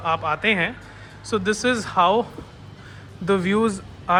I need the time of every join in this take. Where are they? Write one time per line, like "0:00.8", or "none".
none